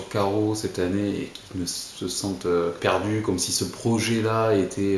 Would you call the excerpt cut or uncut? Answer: cut